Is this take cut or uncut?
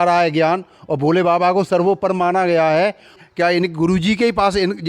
cut